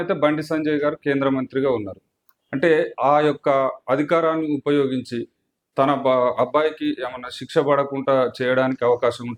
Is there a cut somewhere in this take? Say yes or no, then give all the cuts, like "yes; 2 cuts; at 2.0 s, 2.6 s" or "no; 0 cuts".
no; 0 cuts